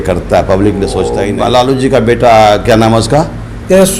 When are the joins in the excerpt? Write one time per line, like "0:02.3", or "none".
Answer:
0:01.2